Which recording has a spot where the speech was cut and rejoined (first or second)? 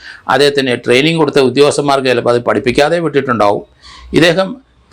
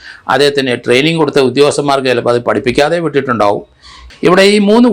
second